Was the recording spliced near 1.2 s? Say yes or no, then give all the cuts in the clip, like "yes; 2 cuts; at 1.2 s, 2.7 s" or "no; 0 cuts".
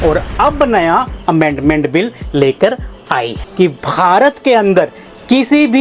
no; 1 cut; at 3.4 s